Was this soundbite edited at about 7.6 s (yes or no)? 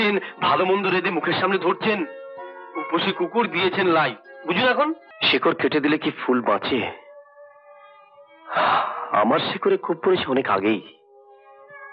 no